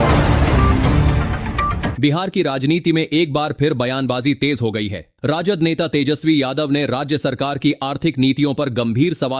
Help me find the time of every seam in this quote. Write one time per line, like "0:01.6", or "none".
0:02.0